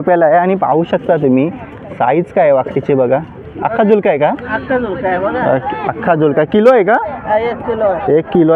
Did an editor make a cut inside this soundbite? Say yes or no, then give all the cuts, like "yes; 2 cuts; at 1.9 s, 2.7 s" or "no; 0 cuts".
no; 0 cuts